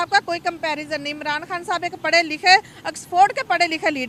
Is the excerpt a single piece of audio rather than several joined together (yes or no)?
yes